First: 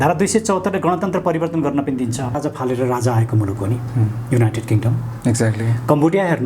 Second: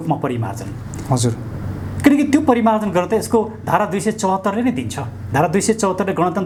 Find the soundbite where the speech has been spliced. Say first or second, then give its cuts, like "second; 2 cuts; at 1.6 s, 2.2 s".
first; 1 cut; at 2.4 s